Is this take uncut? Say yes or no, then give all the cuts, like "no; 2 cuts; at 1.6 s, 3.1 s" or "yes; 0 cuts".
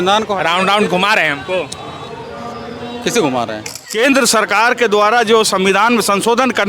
no; 1 cut; at 3.7 s